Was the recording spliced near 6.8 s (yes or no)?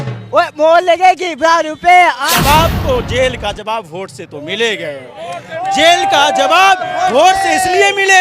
no